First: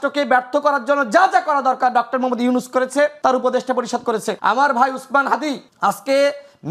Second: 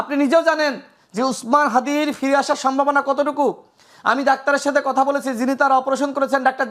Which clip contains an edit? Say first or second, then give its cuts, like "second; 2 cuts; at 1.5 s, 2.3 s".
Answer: first; 3 cuts; at 3.2 s, 4.3 s, 5.7 s